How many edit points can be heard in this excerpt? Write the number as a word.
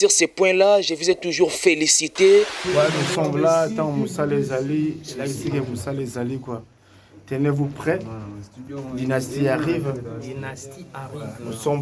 one